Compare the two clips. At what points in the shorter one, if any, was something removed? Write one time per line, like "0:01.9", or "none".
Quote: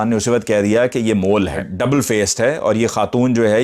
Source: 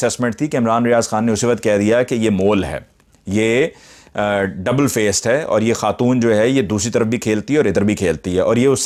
0:01.7